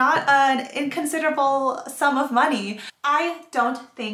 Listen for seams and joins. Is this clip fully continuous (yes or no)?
no